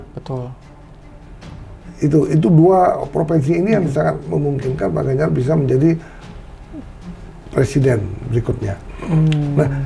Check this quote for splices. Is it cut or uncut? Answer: uncut